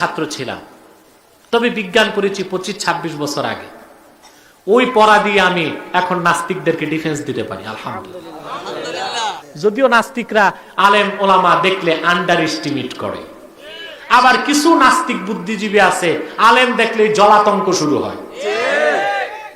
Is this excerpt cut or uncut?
cut